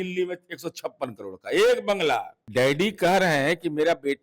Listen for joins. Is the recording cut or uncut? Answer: cut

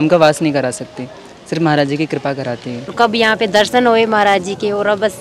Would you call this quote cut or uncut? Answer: cut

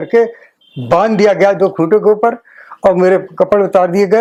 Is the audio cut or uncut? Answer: uncut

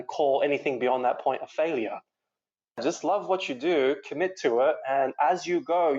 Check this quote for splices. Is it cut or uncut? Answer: cut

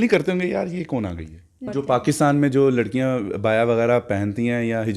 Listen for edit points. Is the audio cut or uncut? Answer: cut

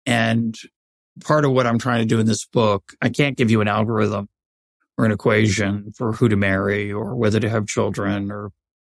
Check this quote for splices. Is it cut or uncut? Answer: uncut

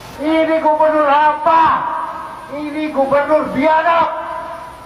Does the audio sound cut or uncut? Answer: uncut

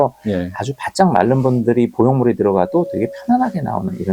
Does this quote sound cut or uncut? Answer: uncut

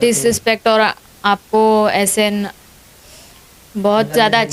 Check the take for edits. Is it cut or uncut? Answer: uncut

